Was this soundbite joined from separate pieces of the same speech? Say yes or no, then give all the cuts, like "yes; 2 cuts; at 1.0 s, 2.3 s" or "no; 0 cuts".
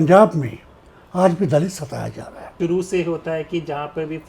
yes; 1 cut; at 2.5 s